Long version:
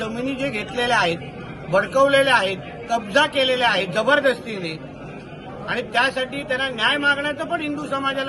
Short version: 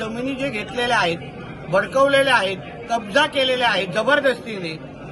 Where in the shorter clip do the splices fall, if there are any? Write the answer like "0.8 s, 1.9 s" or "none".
none